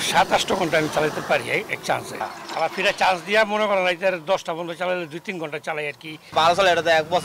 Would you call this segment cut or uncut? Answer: cut